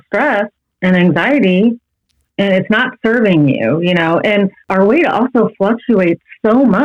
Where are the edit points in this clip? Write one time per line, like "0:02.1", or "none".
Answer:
0:04.6